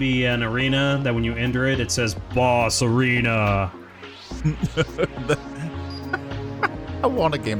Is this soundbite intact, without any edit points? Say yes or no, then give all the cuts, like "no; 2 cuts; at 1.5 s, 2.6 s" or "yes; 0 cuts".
yes; 0 cuts